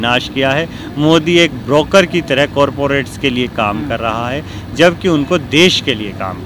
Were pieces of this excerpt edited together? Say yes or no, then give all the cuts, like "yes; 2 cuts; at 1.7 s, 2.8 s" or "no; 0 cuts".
no; 0 cuts